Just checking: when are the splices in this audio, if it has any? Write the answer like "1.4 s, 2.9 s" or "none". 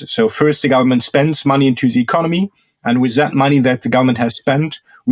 none